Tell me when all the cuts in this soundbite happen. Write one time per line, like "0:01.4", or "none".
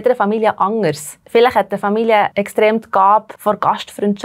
0:01.1
0:02.4
0:03.3